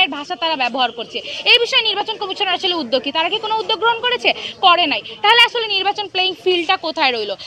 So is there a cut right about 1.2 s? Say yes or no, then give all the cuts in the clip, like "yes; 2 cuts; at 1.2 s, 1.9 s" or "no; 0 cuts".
no; 0 cuts